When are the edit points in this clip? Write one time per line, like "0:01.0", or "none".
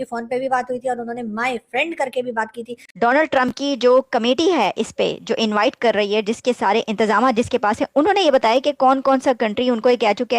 0:02.9